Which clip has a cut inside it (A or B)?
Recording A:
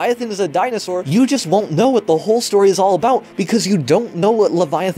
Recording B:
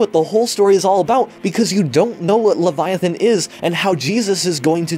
A